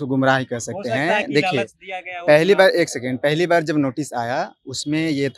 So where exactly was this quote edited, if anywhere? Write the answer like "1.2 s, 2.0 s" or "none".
none

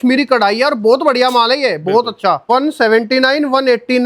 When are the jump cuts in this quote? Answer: 2.4 s

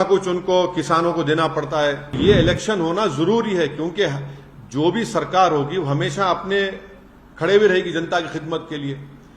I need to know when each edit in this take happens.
2.2 s

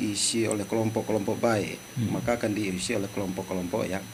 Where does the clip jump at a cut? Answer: none

